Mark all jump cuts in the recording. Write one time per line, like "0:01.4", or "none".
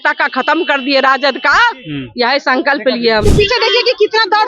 0:03.2